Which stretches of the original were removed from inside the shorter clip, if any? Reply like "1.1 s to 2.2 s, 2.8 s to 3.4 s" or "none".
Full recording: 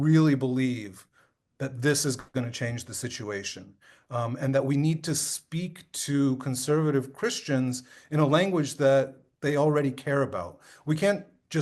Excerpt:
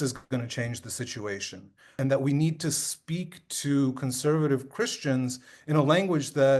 4.0 s to 4.4 s